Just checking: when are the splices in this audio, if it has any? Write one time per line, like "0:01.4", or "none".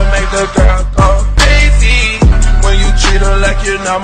none